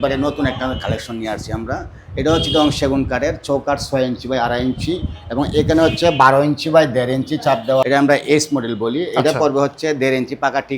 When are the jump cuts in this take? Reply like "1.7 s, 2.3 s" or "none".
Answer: 7.8 s